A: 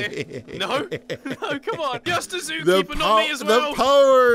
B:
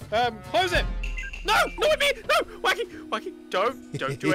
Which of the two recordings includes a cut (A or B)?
A